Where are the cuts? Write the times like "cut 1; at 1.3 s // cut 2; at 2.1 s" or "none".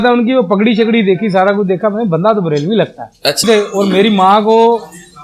cut 1; at 3.4 s